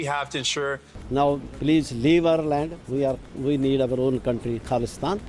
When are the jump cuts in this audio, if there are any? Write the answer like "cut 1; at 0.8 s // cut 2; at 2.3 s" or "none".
cut 1; at 0.9 s